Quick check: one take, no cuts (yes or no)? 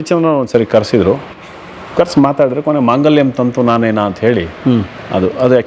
yes